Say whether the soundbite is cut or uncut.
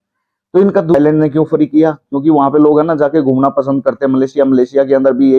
cut